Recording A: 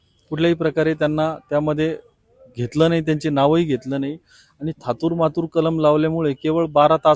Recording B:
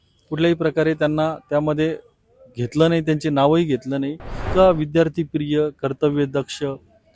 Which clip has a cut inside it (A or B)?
B